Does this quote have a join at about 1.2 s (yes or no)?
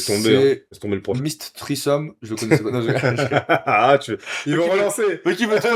yes